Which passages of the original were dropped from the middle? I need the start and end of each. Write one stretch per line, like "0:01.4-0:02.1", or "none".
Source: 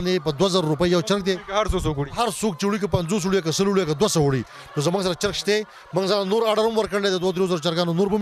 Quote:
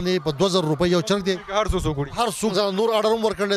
0:02.5-0:06.1

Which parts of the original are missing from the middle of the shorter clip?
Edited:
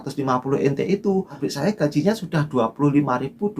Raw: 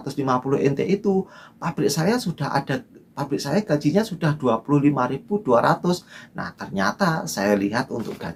0:01.3-0:03.2

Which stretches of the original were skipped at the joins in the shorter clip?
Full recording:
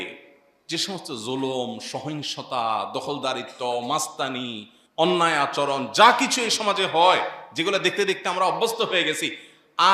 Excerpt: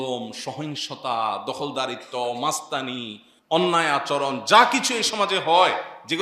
none

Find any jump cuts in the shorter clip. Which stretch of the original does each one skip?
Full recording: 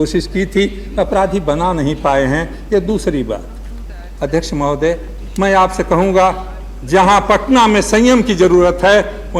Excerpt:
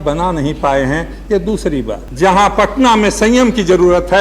0:03.4-0:06.7

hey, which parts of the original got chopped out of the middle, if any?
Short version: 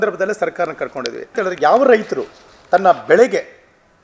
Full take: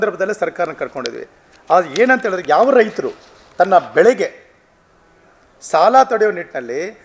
0:01.3-0:02.2

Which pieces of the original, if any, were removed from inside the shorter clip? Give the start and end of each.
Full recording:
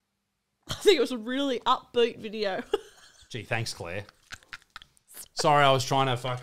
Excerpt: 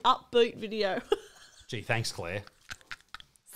none

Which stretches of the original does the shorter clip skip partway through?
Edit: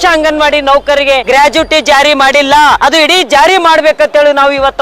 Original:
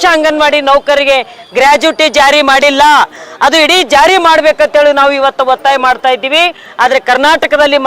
0:01.2-0:01.5
0:03.1-0:03.4

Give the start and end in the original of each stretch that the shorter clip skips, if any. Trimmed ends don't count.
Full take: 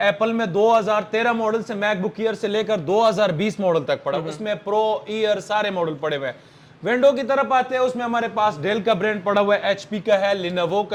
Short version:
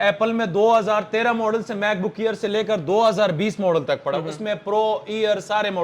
none

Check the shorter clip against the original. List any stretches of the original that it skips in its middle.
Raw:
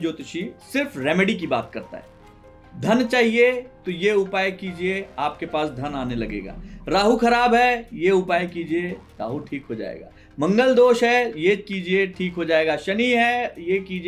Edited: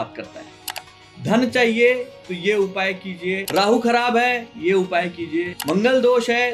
0:05.0-0:06.8
0:08.9-0:10.3

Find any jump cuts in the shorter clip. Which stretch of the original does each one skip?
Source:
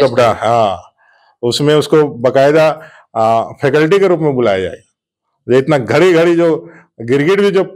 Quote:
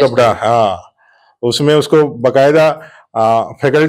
none

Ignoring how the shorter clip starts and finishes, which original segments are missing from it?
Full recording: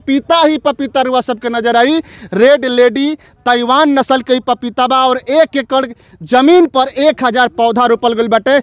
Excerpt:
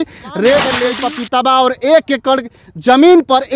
0:02.9-0:04.4

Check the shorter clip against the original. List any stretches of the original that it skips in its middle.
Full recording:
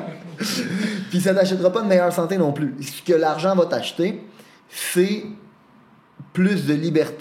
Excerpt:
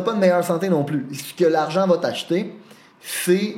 none

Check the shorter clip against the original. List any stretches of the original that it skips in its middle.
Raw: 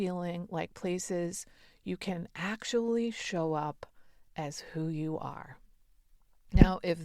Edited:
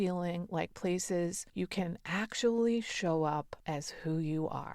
0:01.4-0:01.7
0:03.8-0:04.2

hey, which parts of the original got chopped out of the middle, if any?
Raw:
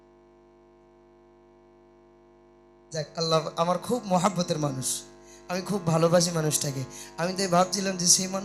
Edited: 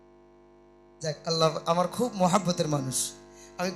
0:02.6-0:02.9

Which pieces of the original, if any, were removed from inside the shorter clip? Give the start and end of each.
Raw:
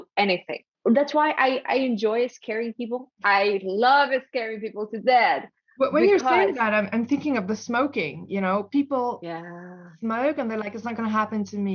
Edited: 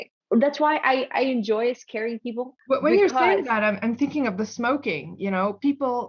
0:03.0-0:05.6

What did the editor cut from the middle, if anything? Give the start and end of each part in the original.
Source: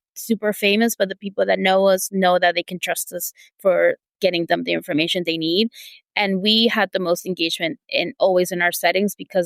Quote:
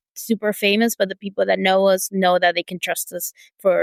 none

